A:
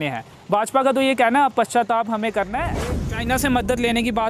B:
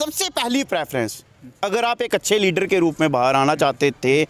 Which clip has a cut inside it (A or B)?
A